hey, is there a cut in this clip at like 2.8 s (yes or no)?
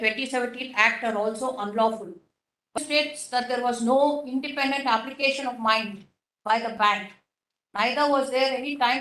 yes